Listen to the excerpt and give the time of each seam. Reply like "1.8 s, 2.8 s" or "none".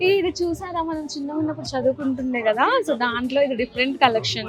none

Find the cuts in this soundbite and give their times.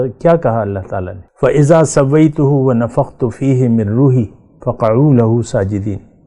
1.2 s

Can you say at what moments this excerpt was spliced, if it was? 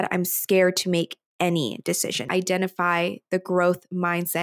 2.3 s

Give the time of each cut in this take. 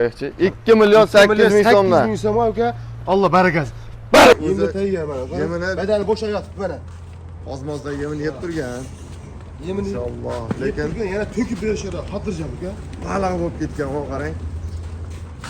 4.3 s

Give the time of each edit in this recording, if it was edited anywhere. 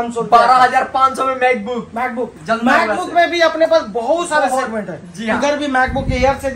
none

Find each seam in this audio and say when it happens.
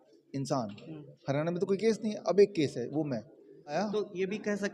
3.7 s

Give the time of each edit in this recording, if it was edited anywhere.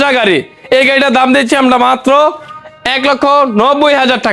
none

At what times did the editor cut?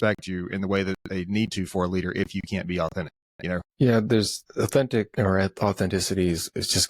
3.7 s, 4.4 s, 5.1 s

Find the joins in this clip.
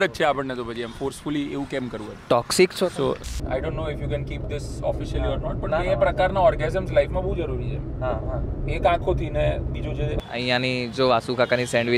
3.3 s, 10.2 s

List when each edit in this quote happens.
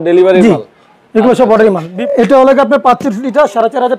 1.9 s

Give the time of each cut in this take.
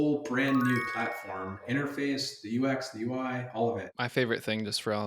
1.6 s, 3.9 s

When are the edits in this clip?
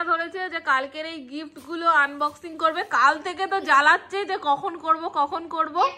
none

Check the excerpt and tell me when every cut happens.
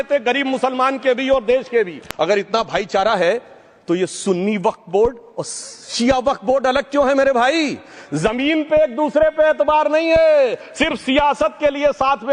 2.0 s

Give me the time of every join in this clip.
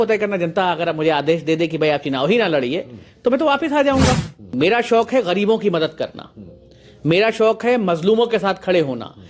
4.5 s

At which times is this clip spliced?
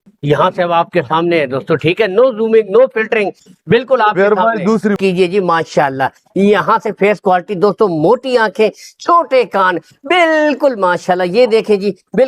5.0 s

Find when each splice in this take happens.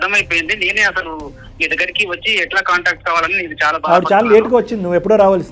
3.8 s

